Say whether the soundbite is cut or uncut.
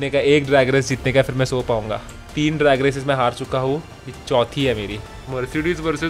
cut